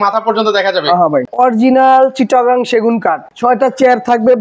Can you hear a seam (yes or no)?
yes